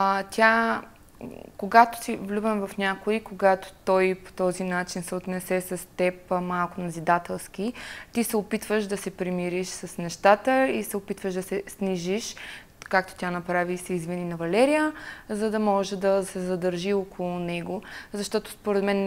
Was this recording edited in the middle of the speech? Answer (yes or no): no